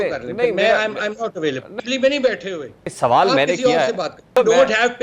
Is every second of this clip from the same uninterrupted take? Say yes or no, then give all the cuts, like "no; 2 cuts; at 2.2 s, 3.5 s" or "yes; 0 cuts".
no; 3 cuts; at 1.7 s, 2.8 s, 4.3 s